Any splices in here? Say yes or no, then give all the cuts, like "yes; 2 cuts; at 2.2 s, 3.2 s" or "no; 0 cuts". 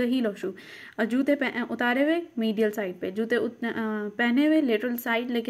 no; 0 cuts